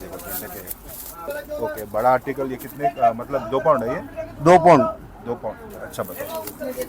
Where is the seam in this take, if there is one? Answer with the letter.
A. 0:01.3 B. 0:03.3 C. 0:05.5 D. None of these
A